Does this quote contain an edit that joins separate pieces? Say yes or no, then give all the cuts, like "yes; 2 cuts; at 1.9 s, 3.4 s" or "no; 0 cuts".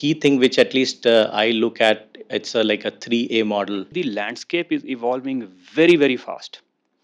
yes; 1 cut; at 3.9 s